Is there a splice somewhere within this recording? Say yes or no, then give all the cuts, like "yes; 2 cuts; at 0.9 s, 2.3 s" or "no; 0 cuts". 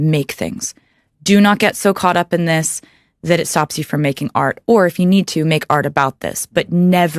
no; 0 cuts